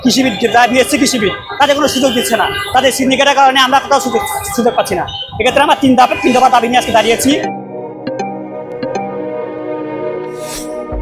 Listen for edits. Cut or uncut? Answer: uncut